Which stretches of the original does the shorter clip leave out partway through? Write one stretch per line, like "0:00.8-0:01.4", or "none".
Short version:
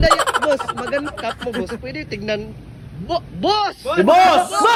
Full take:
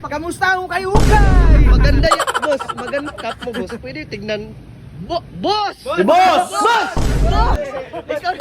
none